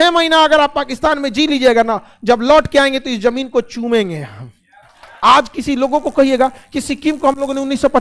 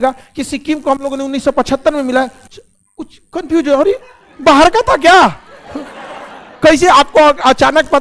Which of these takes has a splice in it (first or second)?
first